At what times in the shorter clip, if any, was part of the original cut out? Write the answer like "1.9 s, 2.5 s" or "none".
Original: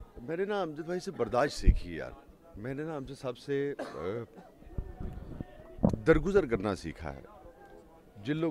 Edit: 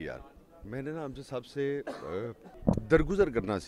2.5 s